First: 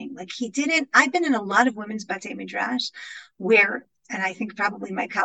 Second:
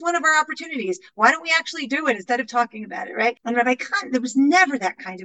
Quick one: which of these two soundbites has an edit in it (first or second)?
second